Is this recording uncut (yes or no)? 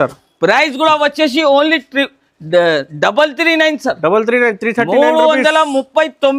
yes